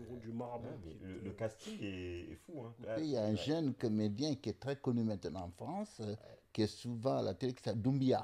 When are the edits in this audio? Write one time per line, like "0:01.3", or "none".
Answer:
0:03.0